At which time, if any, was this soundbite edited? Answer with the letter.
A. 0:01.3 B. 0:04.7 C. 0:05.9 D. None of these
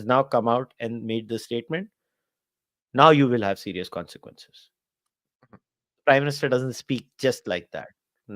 D